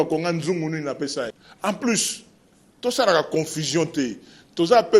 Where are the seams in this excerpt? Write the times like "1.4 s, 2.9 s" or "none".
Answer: 1.3 s